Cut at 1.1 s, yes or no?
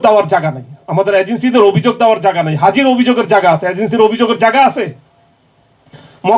no